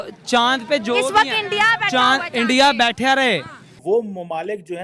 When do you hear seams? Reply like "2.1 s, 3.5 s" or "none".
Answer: 3.9 s